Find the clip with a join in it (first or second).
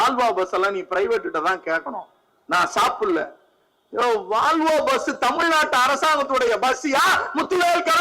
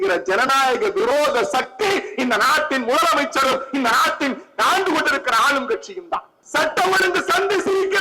second